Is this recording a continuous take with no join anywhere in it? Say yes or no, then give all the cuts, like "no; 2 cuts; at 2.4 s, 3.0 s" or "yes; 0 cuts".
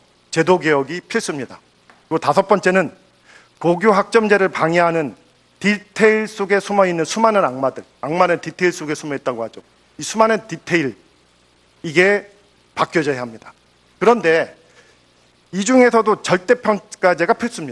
no; 1 cut; at 8.3 s